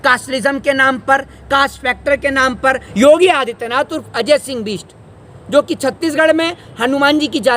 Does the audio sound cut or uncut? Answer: cut